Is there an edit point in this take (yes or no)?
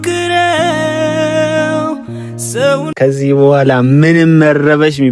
yes